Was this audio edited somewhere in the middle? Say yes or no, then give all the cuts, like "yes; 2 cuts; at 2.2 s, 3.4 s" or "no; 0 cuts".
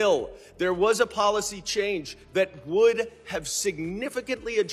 no; 0 cuts